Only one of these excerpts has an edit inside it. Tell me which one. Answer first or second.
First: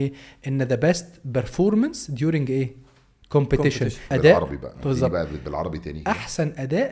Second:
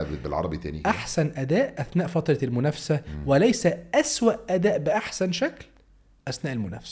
first